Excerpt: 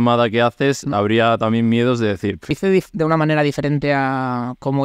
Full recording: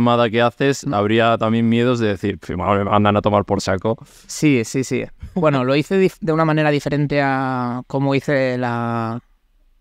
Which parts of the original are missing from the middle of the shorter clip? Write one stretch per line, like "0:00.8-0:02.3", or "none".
0:02.5-0:05.8